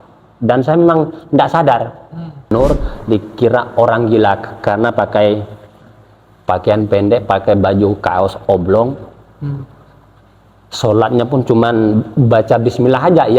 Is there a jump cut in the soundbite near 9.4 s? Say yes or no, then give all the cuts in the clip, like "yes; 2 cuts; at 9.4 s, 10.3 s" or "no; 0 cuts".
no; 1 cut; at 2.5 s